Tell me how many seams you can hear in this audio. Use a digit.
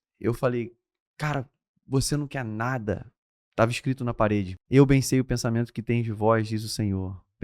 1